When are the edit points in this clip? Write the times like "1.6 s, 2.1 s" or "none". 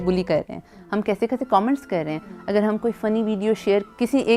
none